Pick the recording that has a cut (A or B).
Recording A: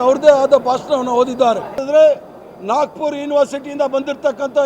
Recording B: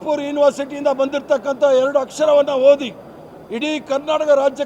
A